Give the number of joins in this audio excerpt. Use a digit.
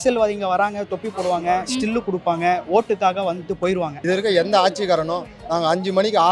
1